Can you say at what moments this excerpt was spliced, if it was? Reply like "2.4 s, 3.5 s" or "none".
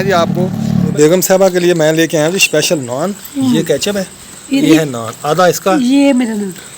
0.9 s, 4.6 s